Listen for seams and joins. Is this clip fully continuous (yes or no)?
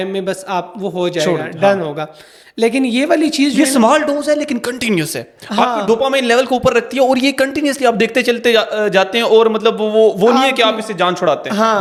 yes